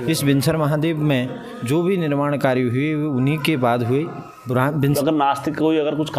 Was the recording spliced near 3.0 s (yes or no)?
no